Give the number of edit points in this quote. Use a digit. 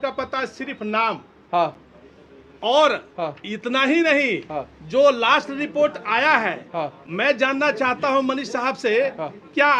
0